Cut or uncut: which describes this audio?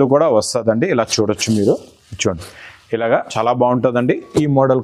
cut